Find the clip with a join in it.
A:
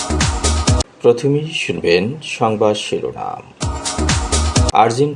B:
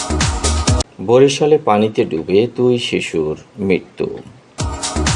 A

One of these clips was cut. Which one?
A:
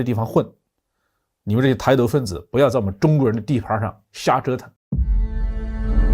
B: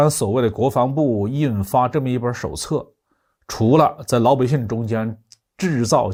A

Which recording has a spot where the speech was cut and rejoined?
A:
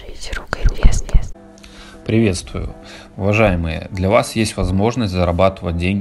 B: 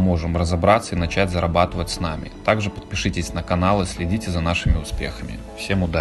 A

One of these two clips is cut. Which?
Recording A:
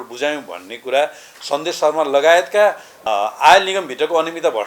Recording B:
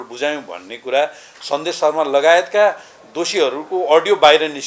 A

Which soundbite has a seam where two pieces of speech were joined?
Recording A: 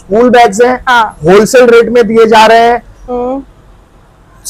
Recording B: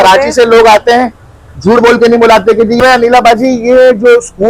B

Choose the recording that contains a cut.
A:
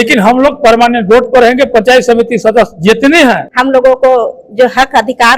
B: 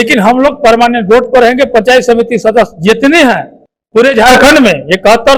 A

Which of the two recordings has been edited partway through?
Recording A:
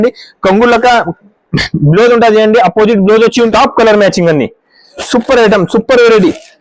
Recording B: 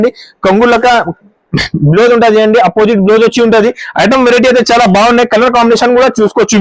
A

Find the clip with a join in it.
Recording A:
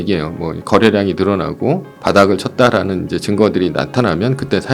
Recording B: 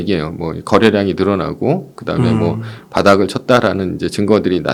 A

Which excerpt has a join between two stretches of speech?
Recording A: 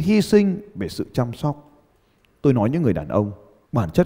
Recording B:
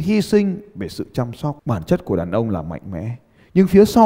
B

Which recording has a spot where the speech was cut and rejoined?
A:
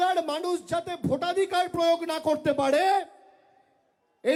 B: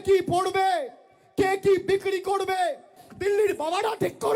B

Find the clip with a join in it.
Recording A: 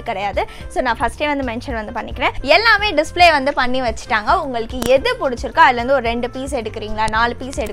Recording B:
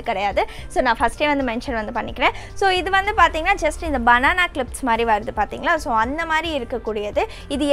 A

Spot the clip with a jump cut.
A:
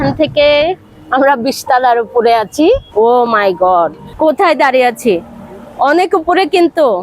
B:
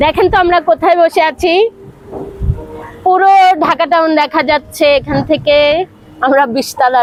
A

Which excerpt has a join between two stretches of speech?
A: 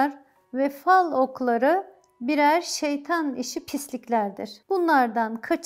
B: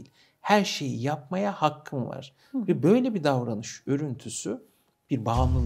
A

